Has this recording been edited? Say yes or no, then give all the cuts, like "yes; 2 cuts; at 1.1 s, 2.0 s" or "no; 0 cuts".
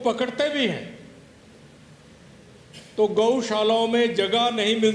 no; 0 cuts